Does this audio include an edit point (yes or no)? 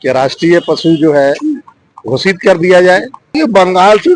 yes